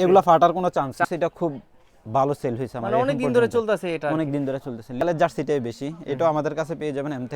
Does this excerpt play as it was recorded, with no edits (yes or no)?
no